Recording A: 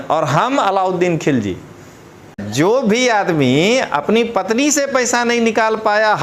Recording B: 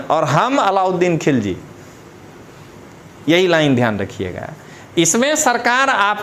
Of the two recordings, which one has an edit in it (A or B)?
A